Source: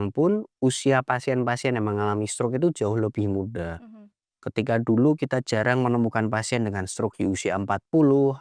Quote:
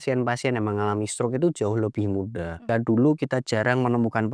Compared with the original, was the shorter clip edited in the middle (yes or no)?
yes